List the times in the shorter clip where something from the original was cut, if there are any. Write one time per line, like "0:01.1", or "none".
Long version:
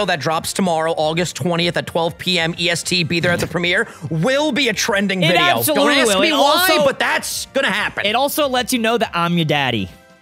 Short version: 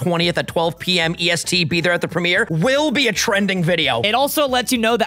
0:02.5
0:03.9